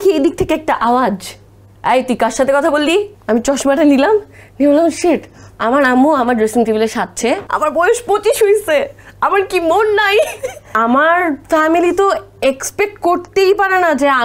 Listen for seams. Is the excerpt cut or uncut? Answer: cut